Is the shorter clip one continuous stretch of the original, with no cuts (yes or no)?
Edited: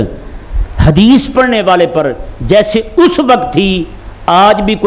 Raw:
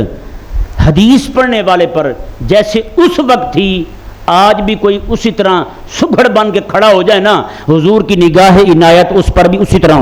yes